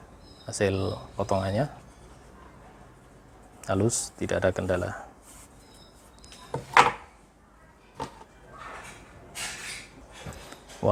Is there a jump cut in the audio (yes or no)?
no